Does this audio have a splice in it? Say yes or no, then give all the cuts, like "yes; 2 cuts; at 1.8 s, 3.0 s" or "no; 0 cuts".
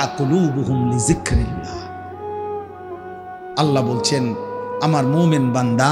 no; 0 cuts